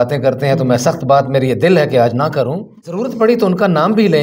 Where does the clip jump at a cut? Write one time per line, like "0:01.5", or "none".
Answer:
0:03.2

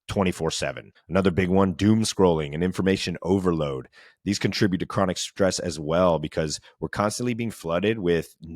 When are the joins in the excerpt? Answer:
0:00.9

